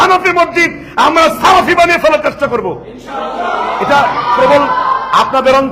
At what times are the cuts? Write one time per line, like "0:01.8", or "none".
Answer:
none

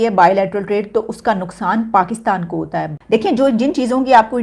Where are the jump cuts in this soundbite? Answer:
0:03.0

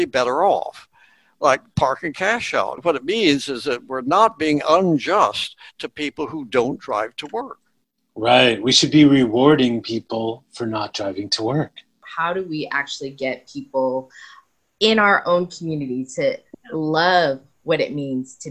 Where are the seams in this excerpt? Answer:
0:02.8
0:12.1

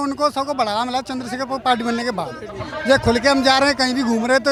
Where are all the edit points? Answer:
none

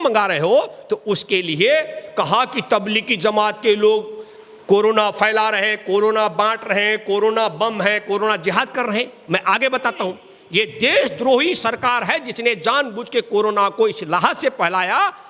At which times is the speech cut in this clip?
0:10.3

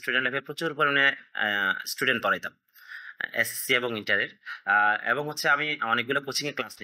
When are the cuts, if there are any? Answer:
none

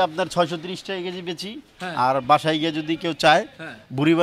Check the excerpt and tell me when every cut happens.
none

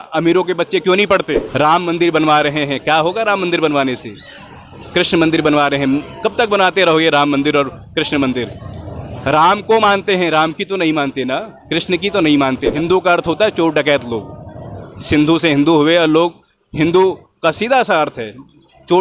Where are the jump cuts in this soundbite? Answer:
0:01.4
0:12.7

